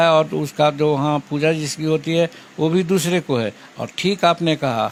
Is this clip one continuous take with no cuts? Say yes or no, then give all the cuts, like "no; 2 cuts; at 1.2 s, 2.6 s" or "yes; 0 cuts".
yes; 0 cuts